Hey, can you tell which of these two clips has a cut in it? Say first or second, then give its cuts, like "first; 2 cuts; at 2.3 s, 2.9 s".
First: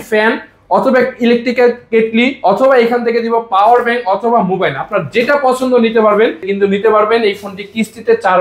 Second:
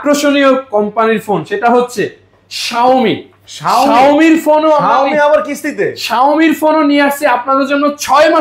first; 1 cut; at 6.5 s